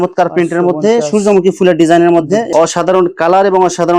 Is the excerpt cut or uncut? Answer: cut